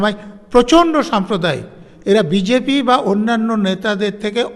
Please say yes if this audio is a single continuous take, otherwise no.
yes